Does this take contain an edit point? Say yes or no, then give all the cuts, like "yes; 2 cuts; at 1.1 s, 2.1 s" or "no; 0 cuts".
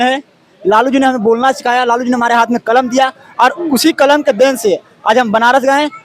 no; 0 cuts